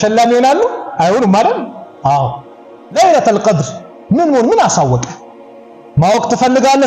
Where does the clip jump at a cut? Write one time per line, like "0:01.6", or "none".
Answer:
0:03.0